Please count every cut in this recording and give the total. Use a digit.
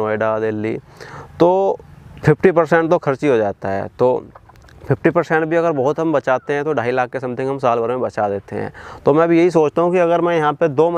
0